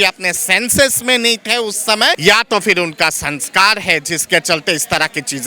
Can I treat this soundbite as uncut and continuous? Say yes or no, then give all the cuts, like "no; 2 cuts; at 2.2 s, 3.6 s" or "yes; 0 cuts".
no; 1 cut; at 2.2 s